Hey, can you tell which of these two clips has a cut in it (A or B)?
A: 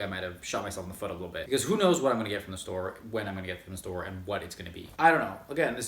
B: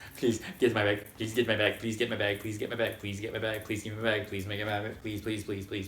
A